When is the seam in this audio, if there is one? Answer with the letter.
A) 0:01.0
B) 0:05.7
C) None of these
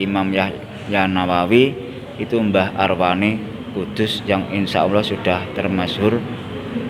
C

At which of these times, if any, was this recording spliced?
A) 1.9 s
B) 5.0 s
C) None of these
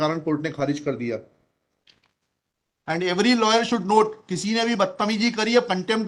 A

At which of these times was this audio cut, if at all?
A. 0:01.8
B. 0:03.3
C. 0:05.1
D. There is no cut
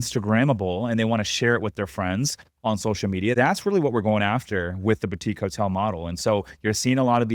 B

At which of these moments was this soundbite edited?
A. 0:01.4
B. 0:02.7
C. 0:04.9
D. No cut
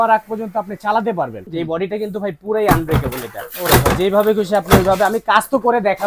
A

